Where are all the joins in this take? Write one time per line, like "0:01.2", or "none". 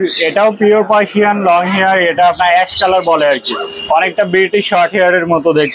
none